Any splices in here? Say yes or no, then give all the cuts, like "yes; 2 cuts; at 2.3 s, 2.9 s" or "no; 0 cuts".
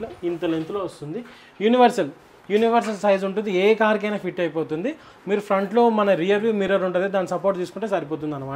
no; 0 cuts